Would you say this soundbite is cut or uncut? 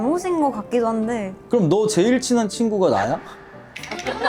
uncut